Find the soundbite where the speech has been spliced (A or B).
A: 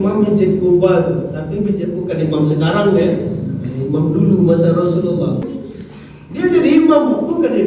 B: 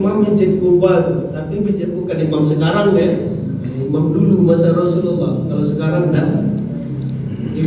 A